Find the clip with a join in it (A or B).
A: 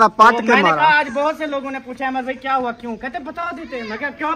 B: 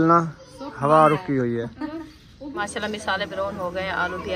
B